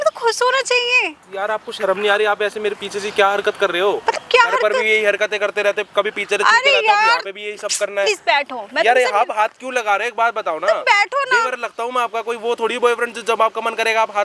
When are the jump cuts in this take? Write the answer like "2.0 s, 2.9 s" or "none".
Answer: none

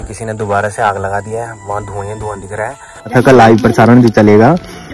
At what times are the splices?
3.0 s

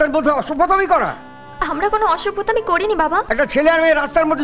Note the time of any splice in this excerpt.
3.3 s

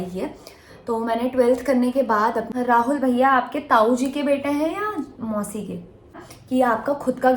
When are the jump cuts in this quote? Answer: 2.5 s, 6.2 s

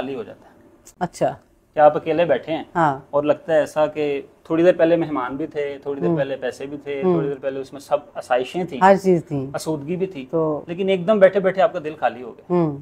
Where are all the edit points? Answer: none

